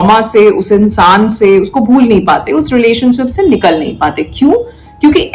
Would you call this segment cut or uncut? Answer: uncut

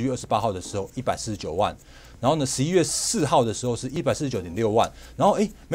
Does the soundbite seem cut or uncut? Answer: cut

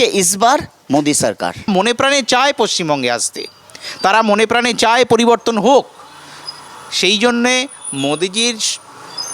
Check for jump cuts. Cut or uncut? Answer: cut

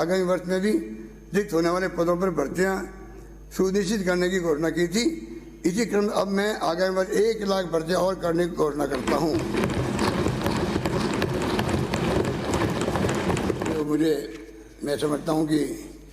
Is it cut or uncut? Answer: cut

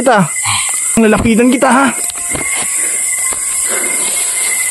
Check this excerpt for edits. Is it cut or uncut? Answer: cut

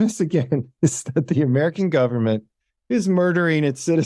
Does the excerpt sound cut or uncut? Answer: uncut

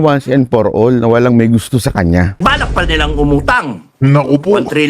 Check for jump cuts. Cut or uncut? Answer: cut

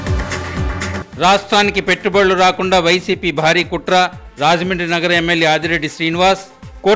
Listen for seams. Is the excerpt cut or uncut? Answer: cut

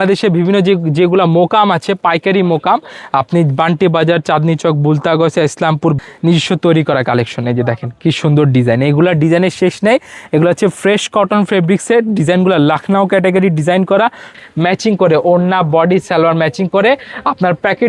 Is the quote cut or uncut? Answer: cut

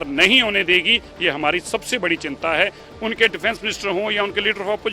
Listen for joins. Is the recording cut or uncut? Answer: cut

